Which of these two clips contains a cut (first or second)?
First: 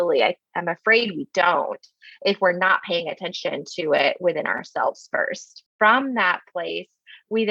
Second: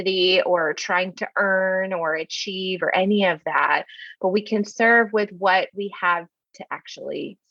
first